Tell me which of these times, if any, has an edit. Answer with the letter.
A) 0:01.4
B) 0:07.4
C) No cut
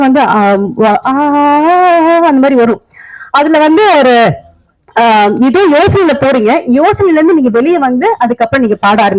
C